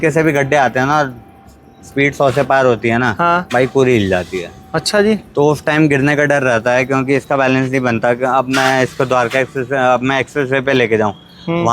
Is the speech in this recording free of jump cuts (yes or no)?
yes